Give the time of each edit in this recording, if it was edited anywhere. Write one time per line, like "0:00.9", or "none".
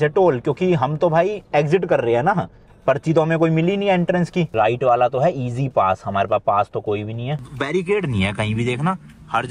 0:04.5
0:07.5